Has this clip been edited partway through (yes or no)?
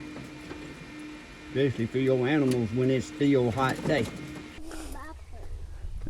yes